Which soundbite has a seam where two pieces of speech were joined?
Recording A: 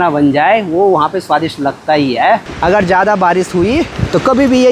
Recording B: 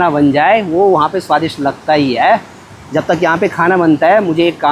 A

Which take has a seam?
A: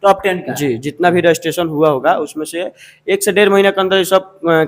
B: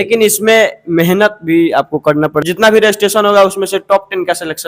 B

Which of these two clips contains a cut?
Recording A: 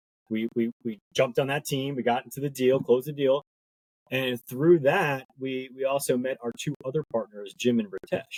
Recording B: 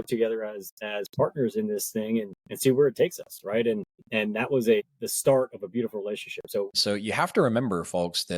B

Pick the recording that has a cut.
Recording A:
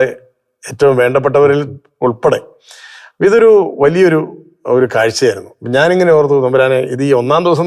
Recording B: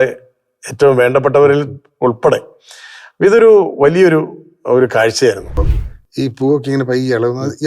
B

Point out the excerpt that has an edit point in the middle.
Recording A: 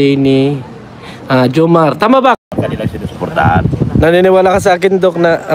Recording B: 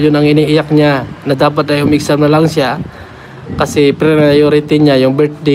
A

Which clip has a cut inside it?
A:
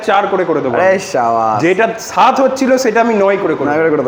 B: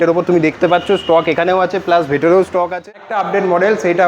B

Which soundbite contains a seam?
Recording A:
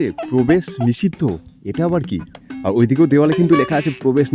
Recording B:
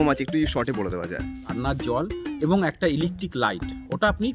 B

